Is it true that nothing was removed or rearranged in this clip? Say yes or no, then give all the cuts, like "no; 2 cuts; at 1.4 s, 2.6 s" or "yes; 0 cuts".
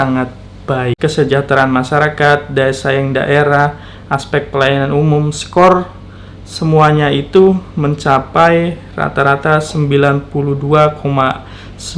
no; 1 cut; at 1.0 s